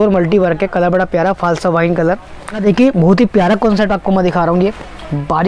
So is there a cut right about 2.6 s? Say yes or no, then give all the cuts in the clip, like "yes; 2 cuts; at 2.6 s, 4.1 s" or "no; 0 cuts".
yes; 1 cut; at 2.6 s